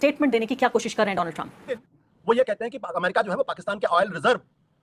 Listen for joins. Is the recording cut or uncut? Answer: cut